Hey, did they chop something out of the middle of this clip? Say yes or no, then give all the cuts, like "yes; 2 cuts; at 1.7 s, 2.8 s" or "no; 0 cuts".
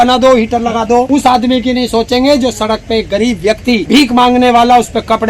yes; 2 cuts; at 1.1 s, 3.8 s